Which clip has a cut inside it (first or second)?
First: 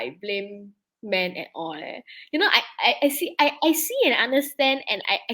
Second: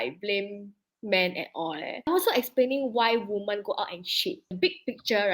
second